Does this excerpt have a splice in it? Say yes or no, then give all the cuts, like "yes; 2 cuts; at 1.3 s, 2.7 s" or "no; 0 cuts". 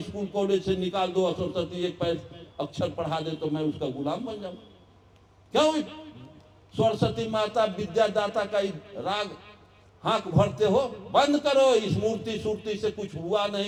no; 0 cuts